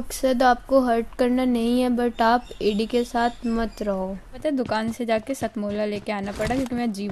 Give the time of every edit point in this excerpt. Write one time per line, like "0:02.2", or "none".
0:04.4